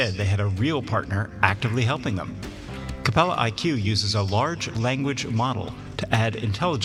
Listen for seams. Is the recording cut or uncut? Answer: uncut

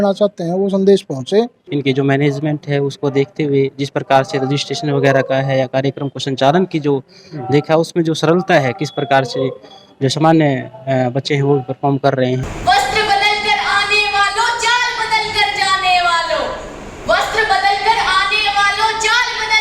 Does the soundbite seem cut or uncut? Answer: cut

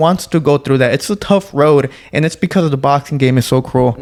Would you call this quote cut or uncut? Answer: uncut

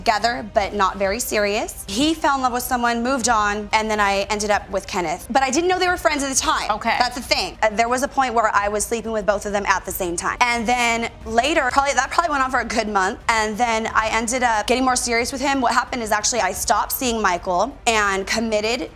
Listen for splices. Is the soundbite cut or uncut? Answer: uncut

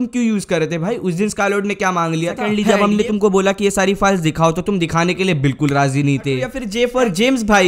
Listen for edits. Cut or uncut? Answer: cut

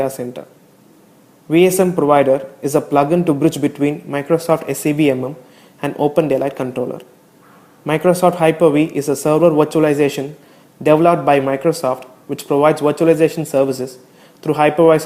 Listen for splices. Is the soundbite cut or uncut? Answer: cut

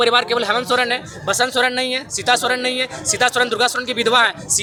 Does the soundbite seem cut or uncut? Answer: uncut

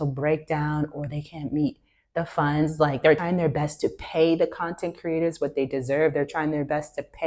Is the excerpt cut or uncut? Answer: cut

